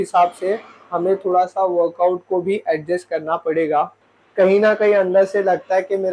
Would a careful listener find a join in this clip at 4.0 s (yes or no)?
yes